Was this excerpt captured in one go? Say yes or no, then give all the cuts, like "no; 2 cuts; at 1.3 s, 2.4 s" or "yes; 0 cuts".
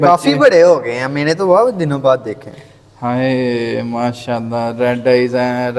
yes; 0 cuts